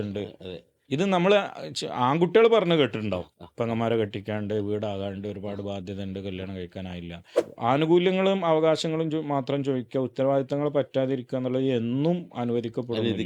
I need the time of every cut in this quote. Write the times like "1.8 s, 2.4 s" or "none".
7.4 s